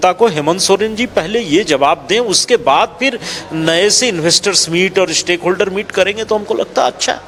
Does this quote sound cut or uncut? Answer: uncut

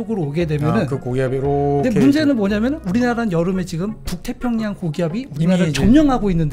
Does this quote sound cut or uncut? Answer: uncut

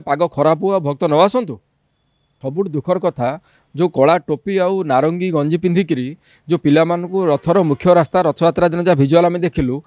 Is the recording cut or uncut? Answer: cut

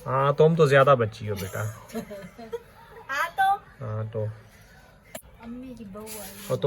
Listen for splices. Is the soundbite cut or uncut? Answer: cut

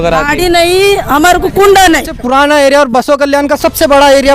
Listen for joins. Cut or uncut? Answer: cut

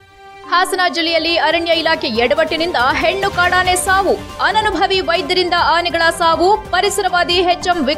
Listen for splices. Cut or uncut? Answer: uncut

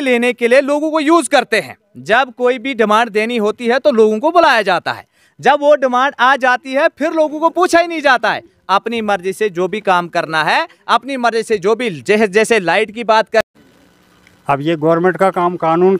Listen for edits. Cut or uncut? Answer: cut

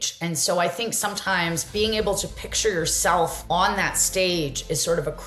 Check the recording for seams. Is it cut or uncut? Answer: cut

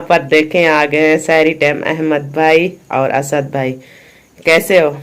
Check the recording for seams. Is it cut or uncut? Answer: uncut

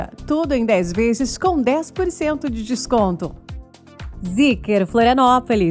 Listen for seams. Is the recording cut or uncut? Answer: cut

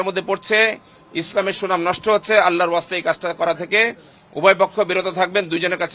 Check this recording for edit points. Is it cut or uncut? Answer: uncut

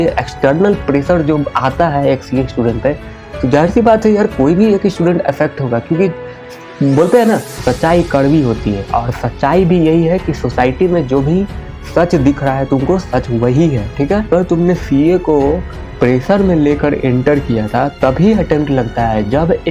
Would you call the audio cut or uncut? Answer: cut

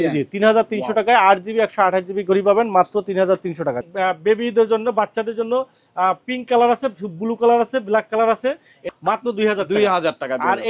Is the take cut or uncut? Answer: cut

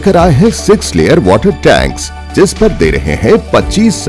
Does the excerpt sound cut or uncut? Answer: uncut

